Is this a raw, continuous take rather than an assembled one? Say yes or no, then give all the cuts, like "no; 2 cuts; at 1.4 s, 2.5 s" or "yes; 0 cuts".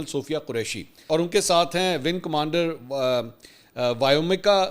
no; 1 cut; at 1.0 s